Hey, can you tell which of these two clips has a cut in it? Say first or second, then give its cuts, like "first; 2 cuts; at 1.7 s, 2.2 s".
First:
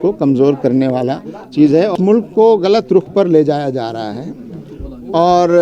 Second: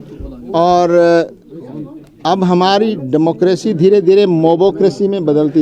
first; 1 cut; at 1.9 s